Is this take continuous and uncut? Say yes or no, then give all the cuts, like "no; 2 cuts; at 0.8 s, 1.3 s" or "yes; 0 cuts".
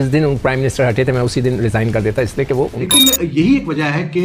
no; 1 cut; at 2.9 s